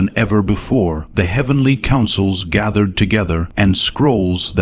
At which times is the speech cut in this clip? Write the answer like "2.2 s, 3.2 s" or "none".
1.0 s, 3.5 s